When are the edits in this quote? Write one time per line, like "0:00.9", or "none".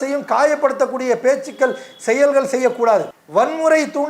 0:03.2